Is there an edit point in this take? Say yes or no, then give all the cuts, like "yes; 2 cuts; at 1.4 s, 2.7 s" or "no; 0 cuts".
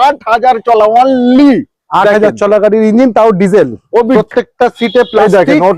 yes; 1 cut; at 4.2 s